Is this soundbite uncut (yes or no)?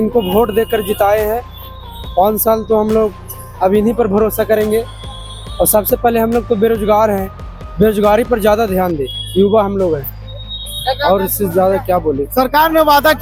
yes